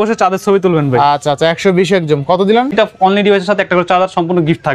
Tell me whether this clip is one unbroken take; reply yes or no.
no